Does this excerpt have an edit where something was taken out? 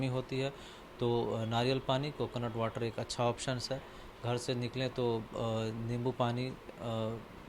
no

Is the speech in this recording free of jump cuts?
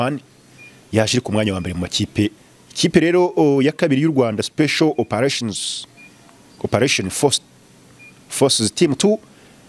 no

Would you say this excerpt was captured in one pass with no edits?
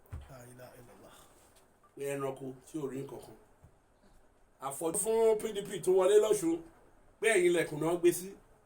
no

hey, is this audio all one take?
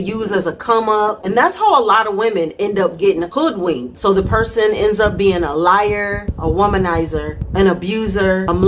no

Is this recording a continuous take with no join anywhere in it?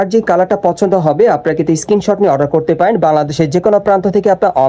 yes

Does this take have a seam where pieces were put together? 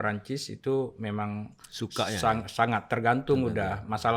no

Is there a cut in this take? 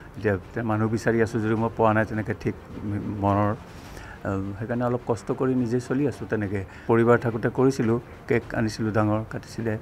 yes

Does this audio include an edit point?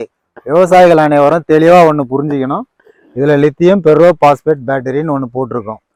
no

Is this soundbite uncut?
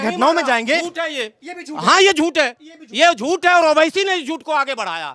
yes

